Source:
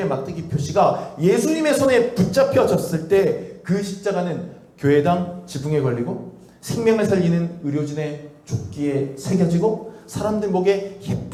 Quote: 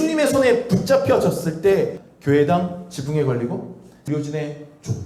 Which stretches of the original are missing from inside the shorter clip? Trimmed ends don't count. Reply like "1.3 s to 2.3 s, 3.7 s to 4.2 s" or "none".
3.5 s to 4.6 s, 6.5 s to 7.6 s